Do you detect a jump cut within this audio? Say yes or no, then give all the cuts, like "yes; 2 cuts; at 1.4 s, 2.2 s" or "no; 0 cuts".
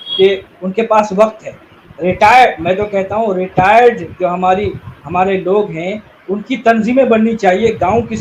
no; 0 cuts